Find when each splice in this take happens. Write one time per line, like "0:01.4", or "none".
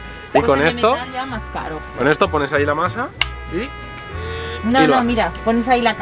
none

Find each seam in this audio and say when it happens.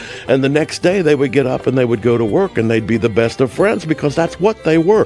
none

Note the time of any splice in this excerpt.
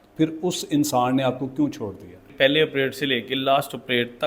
0:02.3

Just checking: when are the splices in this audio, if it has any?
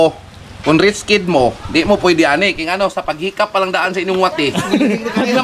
none

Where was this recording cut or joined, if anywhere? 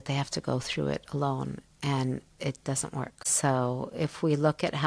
none

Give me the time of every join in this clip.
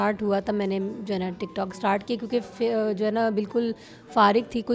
none

